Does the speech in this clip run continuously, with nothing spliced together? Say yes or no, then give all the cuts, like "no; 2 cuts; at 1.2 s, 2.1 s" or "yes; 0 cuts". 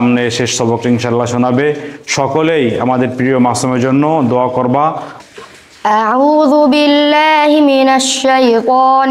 no; 1 cut; at 5.1 s